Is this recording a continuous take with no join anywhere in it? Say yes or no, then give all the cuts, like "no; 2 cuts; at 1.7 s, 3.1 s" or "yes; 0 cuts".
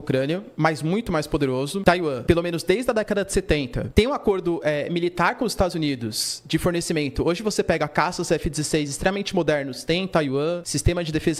yes; 0 cuts